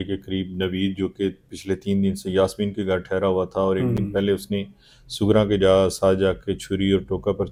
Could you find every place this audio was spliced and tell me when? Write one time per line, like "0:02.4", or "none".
none